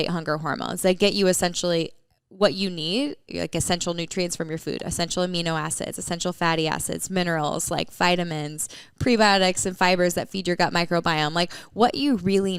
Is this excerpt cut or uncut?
uncut